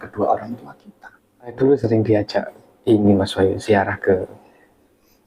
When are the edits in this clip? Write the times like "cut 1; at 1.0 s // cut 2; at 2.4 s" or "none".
cut 1; at 1.5 s